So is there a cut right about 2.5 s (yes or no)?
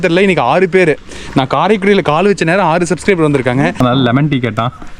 no